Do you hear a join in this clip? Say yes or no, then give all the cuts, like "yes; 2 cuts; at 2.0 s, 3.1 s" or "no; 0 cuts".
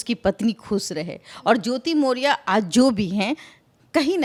no; 0 cuts